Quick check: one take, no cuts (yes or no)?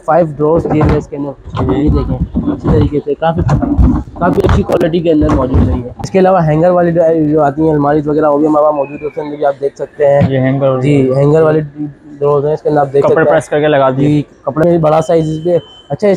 no